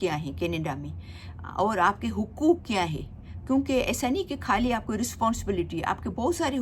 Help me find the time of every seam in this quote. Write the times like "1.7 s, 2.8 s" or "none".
none